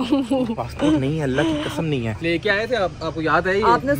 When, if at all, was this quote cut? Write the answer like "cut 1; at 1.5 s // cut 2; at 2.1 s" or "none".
cut 1; at 2.1 s